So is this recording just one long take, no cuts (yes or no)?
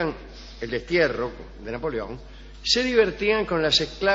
no